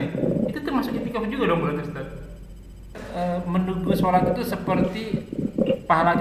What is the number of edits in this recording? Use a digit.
1